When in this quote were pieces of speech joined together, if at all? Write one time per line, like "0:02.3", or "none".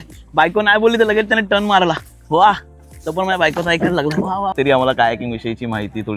0:04.5